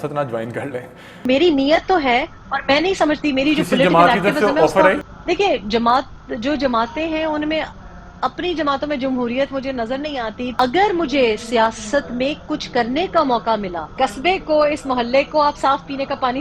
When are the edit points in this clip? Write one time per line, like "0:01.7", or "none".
0:01.2
0:05.1
0:10.5
0:13.8

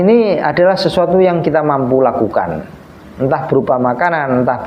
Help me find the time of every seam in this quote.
none

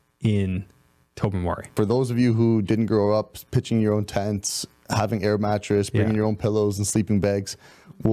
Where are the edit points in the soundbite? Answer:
0:01.7

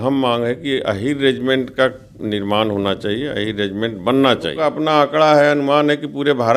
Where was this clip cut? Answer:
0:04.6

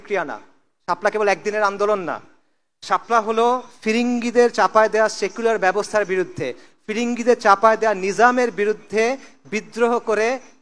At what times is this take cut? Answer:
none

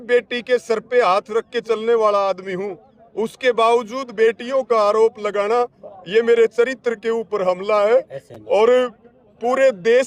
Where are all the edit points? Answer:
none

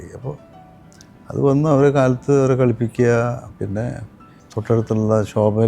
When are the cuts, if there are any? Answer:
0:03.5

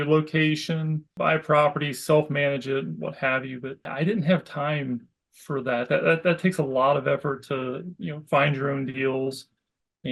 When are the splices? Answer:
0:01.1
0:03.9

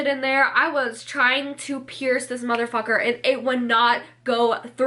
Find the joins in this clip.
none

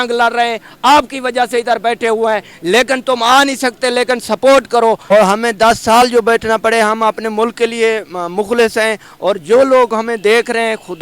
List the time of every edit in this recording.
0:05.1

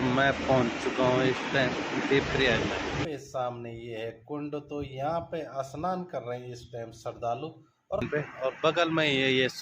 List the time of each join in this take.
0:03.0
0:08.1

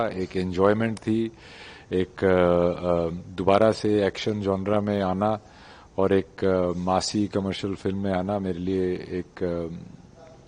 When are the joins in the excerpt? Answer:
none

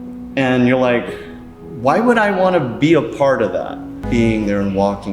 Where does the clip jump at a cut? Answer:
0:04.0

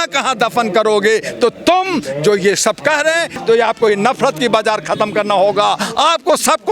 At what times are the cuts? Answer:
0:03.3

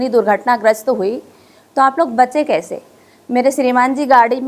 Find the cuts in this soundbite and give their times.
none

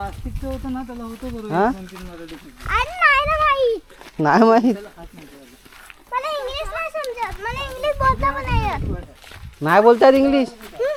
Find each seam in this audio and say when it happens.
none

